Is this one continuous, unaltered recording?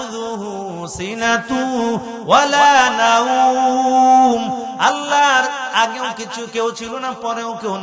yes; 0 cuts

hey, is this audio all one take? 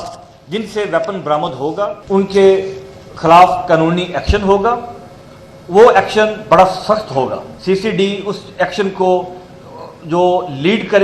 no; 2 cuts; at 2.0 s, 7.5 s

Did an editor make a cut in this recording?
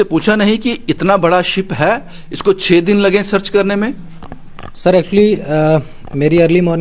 no; 0 cuts

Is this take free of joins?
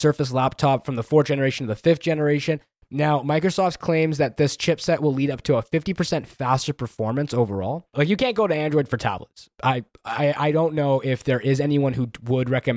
no; 2 cuts; at 2.7 s, 7.9 s

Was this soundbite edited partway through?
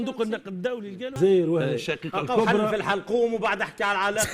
yes; 1 cut; at 1.2 s

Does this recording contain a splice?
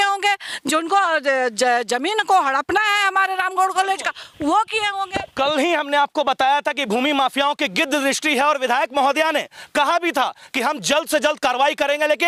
no; 0 cuts

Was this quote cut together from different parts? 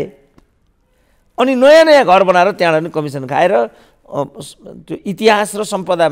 no; 0 cuts

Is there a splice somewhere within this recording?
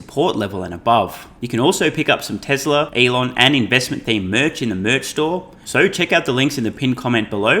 yes; 3 cuts; at 1.3 s, 2.9 s, 5.6 s

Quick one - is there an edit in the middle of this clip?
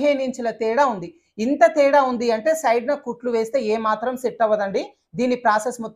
no; 0 cuts

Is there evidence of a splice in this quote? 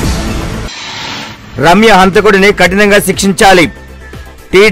yes; 1 cut; at 1.2 s

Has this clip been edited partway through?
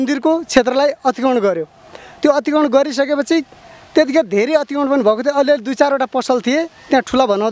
no; 0 cuts

